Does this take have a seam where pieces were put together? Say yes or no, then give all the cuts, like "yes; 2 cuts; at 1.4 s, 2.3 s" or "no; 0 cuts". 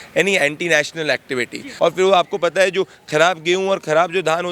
yes; 1 cut; at 1.7 s